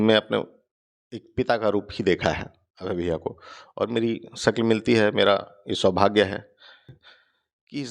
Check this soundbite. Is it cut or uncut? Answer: cut